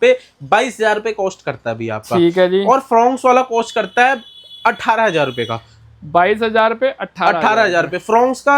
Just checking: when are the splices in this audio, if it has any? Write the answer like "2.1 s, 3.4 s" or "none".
none